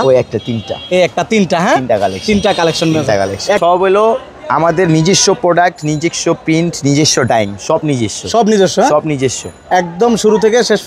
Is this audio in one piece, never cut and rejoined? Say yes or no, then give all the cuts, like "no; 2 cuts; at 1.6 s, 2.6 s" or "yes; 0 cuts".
no; 1 cut; at 3.6 s